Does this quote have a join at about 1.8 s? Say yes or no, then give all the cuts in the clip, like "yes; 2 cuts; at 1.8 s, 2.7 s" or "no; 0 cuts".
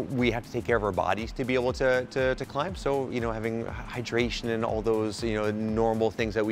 no; 0 cuts